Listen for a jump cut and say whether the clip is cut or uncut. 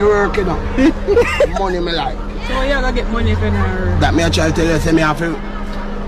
uncut